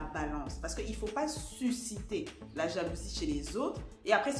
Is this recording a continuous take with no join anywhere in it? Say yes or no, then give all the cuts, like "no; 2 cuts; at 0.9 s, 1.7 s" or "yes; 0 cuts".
yes; 0 cuts